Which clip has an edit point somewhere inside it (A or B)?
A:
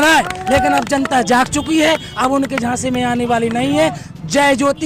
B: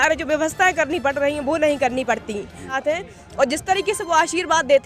B